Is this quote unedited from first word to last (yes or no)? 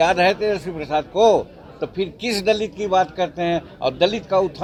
yes